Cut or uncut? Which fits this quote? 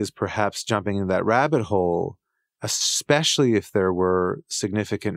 uncut